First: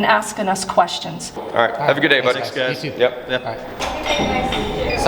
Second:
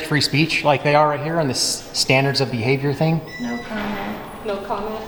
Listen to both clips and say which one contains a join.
first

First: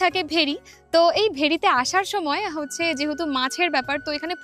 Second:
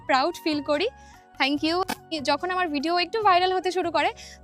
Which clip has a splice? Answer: second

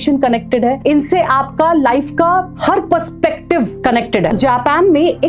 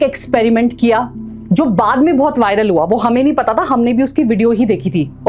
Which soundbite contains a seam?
first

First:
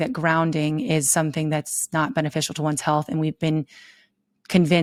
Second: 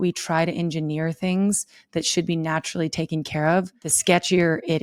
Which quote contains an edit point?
second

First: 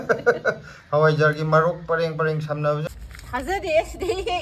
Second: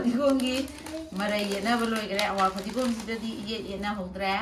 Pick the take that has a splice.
first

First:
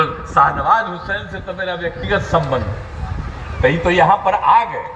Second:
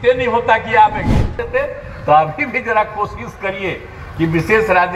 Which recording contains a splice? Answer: second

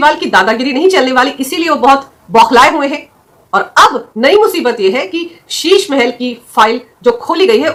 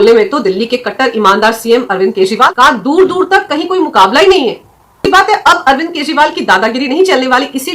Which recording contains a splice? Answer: second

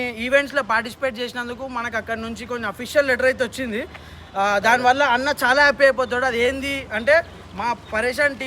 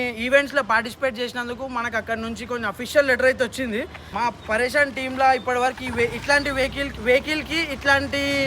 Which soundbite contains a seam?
second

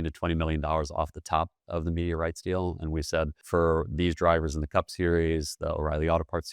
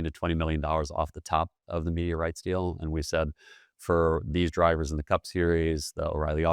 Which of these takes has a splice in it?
first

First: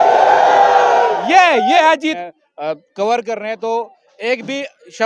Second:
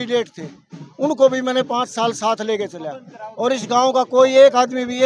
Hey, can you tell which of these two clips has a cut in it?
first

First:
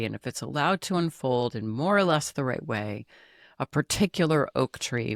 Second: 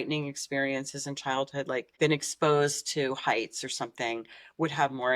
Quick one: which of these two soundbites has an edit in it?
second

